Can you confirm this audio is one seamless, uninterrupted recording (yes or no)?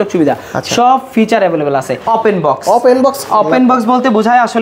no